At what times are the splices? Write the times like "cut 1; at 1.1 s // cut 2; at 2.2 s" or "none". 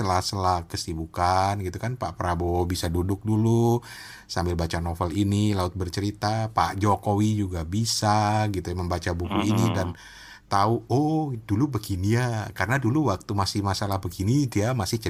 none

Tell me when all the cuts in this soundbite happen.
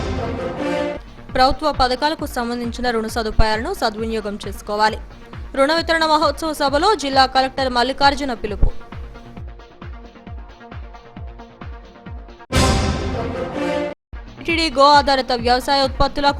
cut 1; at 0.9 s

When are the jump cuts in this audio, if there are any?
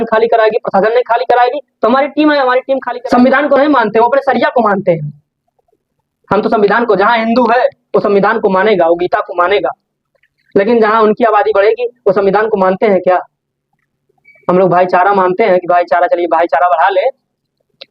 cut 1; at 2.9 s

